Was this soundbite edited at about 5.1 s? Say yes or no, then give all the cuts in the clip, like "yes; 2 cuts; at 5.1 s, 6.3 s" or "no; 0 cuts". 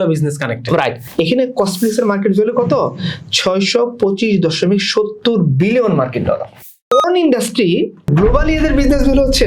no; 3 cuts; at 1.0 s, 6.5 s, 8.1 s